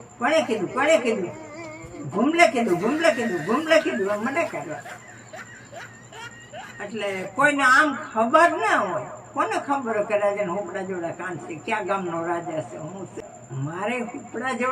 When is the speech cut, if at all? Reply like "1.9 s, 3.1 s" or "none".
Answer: 13.2 s